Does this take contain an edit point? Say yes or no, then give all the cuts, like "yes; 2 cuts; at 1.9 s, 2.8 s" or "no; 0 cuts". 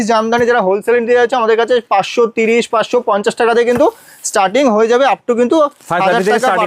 no; 0 cuts